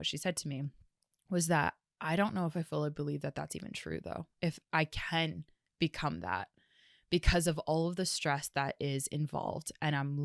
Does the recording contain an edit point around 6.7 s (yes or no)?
no